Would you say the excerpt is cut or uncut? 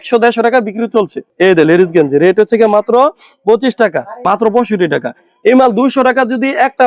cut